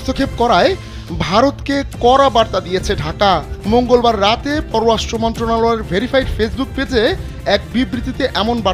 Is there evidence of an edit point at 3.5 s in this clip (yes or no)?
no